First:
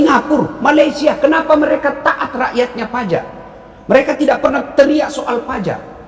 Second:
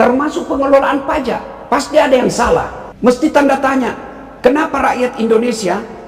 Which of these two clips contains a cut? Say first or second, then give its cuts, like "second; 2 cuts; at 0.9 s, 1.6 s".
second; 2 cuts; at 1.5 s, 2.8 s